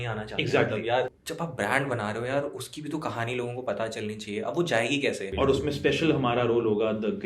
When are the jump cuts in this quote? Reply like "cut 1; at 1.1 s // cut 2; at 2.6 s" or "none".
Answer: cut 1; at 1.2 s // cut 2; at 5.3 s